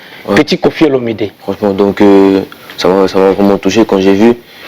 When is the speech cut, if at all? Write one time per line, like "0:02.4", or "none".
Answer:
0:01.4